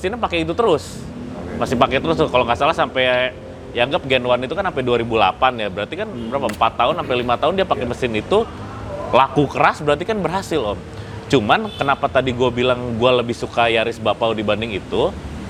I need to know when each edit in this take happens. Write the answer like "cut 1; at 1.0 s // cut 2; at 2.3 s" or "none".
none